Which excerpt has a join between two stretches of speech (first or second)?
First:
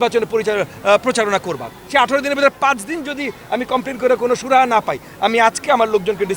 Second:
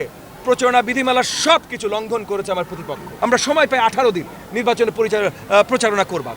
second